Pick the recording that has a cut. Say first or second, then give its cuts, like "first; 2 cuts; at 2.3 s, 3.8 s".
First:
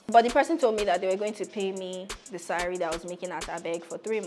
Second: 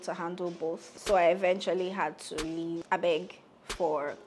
second; 2 cuts; at 0.9 s, 2.8 s